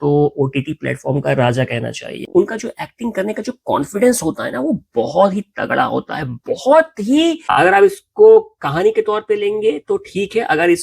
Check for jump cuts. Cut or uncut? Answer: cut